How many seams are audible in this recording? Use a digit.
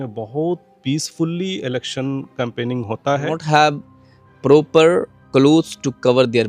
1